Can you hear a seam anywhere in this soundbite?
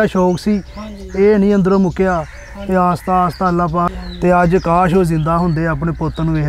yes; 1 cut; at 3.9 s

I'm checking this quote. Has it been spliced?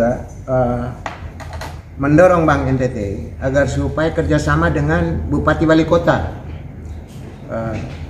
no; 0 cuts

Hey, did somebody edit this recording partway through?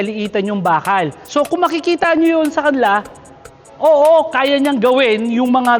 yes; 1 cut; at 1.2 s

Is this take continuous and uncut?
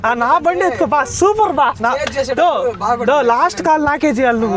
no; 1 cut; at 1.8 s

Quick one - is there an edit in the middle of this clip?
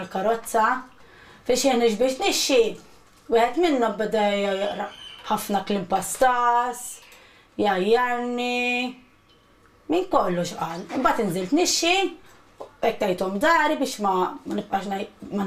no; 0 cuts

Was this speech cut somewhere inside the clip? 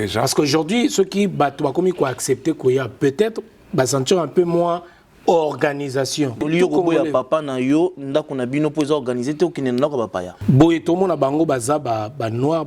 yes; 2 cuts; at 6.4 s, 10.3 s

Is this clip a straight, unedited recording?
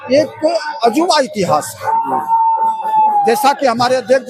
yes; 0 cuts

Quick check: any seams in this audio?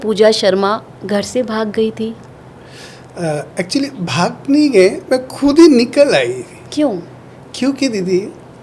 no; 0 cuts

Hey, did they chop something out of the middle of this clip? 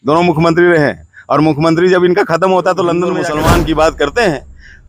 yes; 1 cut; at 3.2 s

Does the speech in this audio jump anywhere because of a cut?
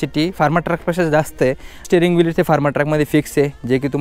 yes; 1 cut; at 1.9 s

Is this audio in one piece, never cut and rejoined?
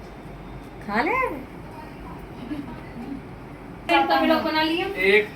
no; 1 cut; at 3.9 s

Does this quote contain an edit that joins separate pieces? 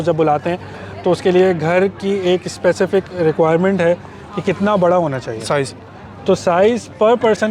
no; 0 cuts

